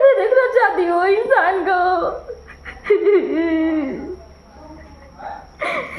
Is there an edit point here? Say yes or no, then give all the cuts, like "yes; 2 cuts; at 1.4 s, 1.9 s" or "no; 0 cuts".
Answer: no; 0 cuts